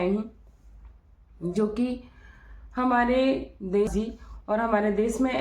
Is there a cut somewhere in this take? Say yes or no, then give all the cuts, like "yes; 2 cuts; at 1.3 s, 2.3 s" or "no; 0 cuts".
yes; 1 cut; at 3.9 s